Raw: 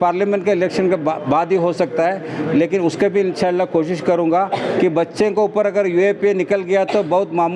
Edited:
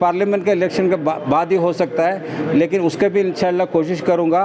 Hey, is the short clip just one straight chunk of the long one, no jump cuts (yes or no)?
yes